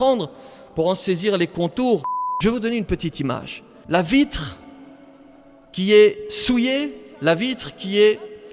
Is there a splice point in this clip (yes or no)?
yes